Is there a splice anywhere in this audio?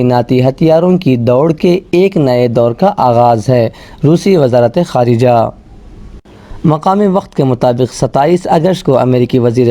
no; 0 cuts

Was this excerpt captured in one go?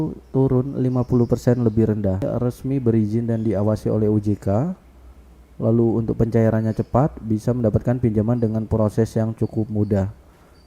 no; 1 cut; at 2.2 s

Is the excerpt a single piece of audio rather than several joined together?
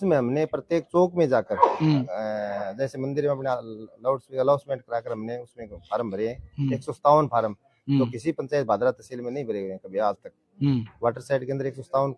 yes; 0 cuts

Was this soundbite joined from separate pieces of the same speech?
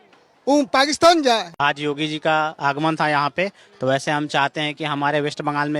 yes; 1 cut; at 1.5 s

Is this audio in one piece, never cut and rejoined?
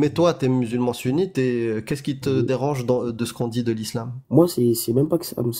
no; 1 cut; at 4.2 s

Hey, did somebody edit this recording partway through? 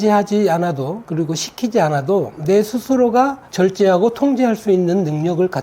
no; 0 cuts

